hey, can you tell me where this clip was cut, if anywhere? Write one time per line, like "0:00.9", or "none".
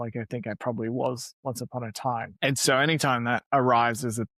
0:02.3
0:03.4